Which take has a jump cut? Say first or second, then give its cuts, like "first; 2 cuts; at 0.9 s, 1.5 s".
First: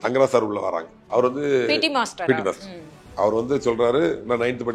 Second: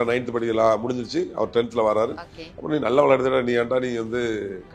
first; 1 cut; at 0.9 s